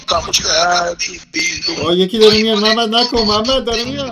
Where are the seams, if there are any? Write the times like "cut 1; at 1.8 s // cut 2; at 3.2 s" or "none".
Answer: none